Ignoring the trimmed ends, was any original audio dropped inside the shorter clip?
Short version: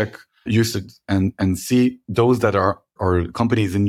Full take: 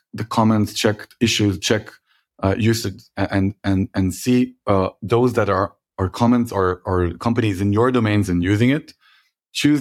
yes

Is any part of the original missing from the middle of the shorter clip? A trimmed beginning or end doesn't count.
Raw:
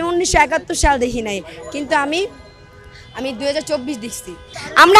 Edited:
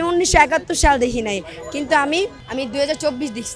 yes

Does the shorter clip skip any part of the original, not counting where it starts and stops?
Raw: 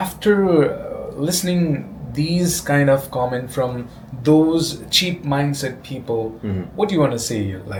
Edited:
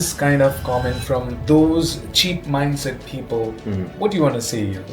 yes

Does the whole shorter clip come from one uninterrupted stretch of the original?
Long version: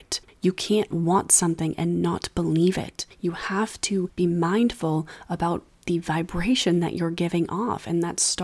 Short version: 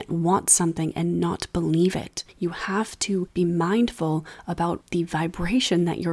no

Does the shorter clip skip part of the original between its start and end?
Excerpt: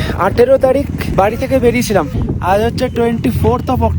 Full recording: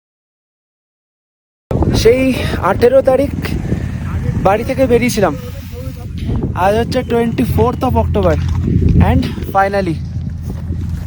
yes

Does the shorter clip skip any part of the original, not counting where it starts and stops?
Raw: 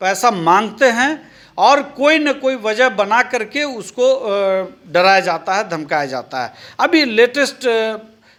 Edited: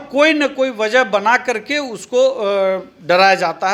no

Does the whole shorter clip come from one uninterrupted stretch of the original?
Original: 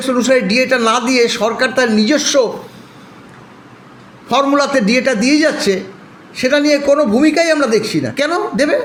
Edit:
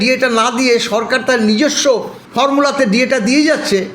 no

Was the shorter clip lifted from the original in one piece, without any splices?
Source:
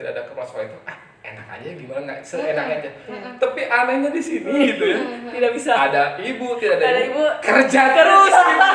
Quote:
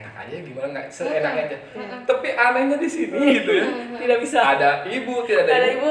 yes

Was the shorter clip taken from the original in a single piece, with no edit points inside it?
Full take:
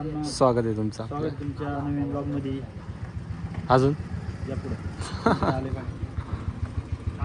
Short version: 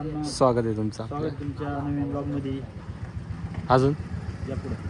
yes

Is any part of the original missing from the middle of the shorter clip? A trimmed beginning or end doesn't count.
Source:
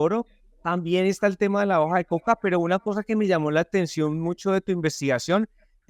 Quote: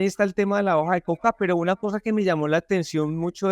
no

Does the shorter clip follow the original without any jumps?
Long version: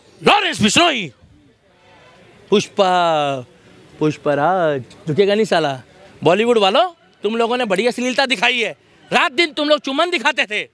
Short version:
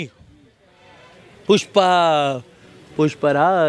yes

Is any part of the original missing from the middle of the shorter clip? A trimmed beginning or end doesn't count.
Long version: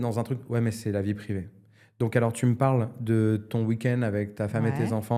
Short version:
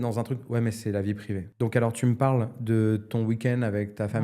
yes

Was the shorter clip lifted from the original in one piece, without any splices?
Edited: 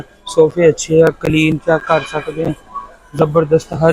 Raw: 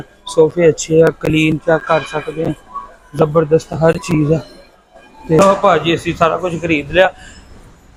yes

